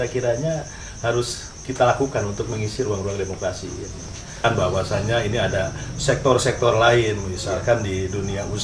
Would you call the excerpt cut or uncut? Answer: cut